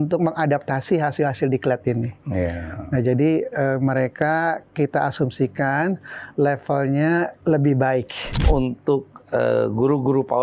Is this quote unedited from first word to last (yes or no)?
no